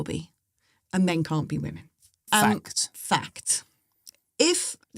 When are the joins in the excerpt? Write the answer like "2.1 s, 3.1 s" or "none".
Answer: none